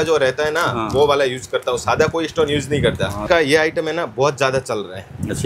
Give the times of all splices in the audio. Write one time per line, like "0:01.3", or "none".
0:03.2